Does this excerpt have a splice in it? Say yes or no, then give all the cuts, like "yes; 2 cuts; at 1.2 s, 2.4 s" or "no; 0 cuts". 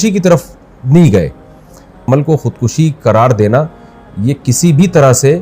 yes; 1 cut; at 2.0 s